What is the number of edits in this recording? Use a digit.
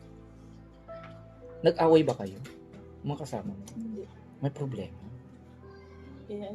1